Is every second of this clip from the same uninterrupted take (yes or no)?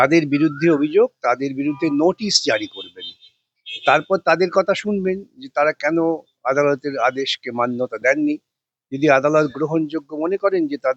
yes